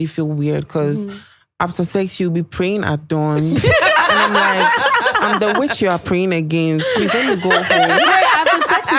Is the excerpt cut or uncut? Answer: uncut